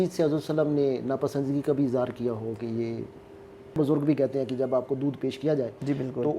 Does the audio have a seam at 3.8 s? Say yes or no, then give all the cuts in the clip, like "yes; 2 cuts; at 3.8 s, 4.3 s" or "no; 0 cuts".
yes; 1 cut; at 3.8 s